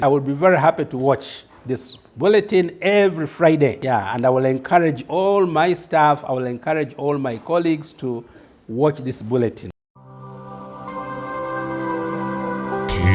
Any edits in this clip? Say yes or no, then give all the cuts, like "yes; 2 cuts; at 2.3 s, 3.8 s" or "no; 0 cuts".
yes; 1 cut; at 9.6 s